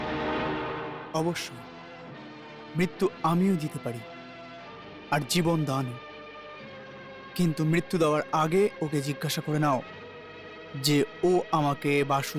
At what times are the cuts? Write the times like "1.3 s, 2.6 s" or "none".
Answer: none